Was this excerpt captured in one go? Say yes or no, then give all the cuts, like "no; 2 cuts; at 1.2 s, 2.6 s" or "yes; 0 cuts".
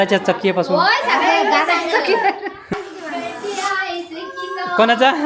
no; 1 cut; at 2.7 s